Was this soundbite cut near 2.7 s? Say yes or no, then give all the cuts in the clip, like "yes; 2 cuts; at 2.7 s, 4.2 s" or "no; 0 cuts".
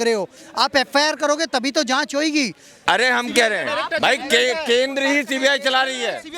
yes; 1 cut; at 2.7 s